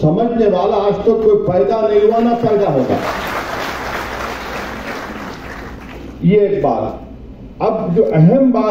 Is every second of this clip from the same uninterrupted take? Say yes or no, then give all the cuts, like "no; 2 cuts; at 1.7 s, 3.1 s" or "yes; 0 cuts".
yes; 0 cuts